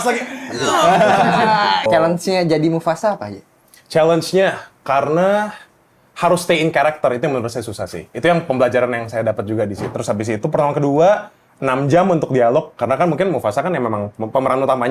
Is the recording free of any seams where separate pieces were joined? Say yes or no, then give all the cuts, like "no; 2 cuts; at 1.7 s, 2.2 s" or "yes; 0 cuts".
no; 2 cuts; at 1.9 s, 9.9 s